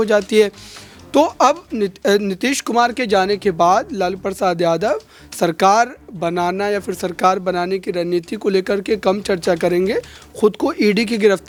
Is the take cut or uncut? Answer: uncut